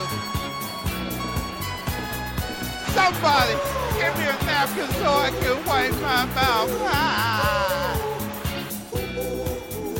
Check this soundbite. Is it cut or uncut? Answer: uncut